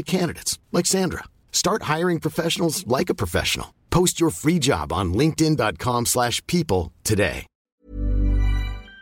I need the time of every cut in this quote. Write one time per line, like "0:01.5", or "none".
0:07.6